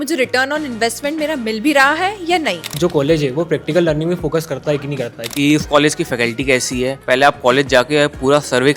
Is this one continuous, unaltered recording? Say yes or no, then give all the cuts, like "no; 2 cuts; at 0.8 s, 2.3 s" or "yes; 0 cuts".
no; 3 cuts; at 2.6 s, 5.2 s, 7.0 s